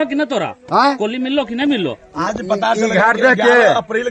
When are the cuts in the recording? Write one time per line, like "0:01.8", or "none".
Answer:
none